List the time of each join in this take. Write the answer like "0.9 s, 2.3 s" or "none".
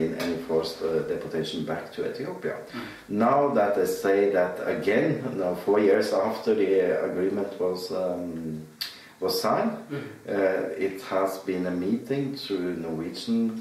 none